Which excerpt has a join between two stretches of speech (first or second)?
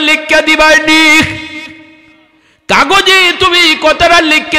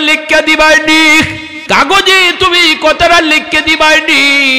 second